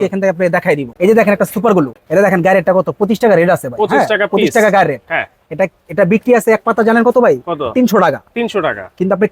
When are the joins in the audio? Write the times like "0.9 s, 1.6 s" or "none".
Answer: 0.9 s, 2.0 s